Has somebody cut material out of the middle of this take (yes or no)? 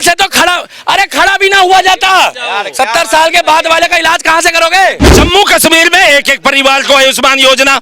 yes